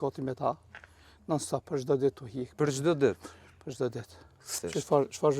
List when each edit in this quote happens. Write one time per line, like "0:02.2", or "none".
0:04.5